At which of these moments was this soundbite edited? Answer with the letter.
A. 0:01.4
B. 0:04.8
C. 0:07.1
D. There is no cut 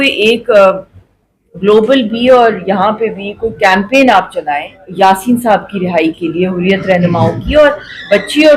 B